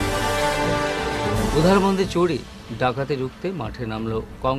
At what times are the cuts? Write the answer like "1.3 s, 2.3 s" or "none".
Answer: 1.2 s